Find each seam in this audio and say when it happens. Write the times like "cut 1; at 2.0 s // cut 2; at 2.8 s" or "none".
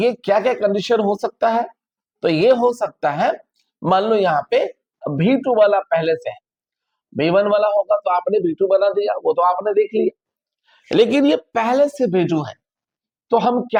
none

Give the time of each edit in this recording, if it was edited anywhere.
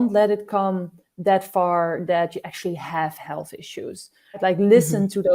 cut 1; at 4.4 s

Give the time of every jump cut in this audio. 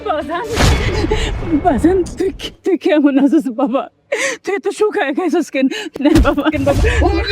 cut 1; at 6.0 s

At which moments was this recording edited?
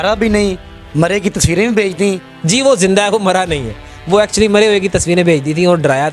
cut 1; at 2.3 s

